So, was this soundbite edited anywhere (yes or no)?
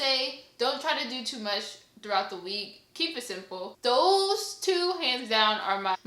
yes